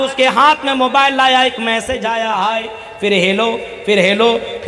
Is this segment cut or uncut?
cut